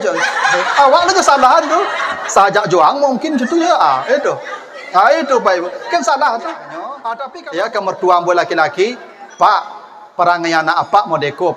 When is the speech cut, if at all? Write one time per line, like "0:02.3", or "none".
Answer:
0:07.0